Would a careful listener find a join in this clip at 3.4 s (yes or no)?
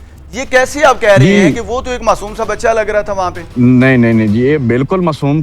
yes